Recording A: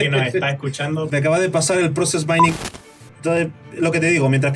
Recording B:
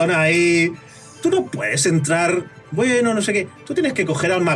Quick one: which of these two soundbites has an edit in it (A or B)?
A